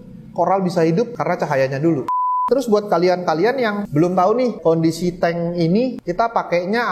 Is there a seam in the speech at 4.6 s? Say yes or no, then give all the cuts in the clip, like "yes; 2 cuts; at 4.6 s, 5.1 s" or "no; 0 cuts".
yes; 4 cuts; at 2.3 s, 3.8 s, 4.6 s, 6.0 s